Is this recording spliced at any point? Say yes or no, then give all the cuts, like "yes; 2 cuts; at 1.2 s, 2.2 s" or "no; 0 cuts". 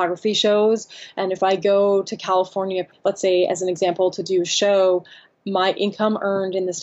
yes; 1 cut; at 2.9 s